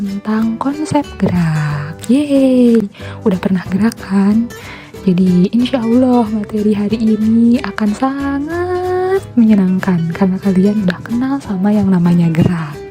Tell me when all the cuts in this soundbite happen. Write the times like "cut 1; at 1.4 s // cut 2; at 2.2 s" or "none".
none